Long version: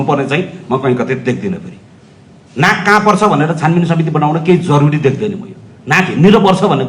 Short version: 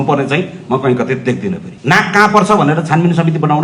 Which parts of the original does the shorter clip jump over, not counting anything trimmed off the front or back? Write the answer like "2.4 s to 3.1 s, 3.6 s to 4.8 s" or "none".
1.7 s to 2.4 s